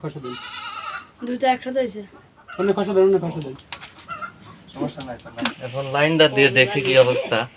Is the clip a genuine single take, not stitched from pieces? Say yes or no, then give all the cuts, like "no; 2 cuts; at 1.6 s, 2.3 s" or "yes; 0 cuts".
no; 1 cut; at 5.4 s